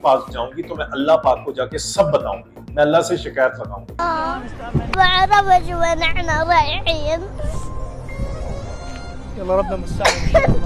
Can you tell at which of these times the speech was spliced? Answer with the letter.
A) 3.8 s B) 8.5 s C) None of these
A